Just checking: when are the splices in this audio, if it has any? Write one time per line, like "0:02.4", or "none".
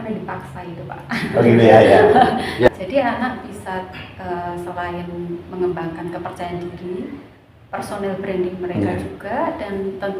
0:02.7